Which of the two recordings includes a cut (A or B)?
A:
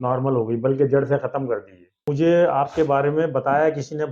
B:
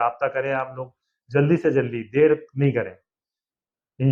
A